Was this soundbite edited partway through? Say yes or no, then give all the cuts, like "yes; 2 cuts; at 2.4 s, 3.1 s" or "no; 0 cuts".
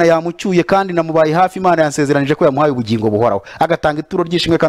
no; 0 cuts